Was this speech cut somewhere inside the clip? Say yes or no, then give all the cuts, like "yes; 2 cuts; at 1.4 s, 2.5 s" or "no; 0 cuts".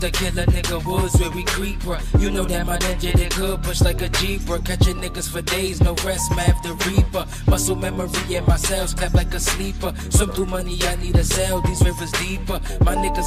no; 0 cuts